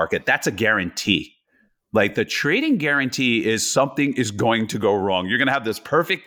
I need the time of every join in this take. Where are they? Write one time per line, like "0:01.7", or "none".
none